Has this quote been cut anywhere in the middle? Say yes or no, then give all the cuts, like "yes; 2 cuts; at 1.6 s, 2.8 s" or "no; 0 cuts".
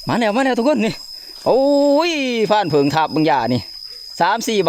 no; 0 cuts